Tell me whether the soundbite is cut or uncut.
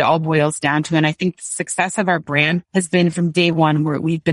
cut